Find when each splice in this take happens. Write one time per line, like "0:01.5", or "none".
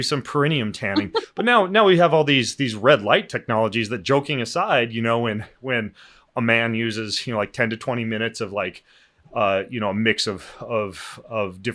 none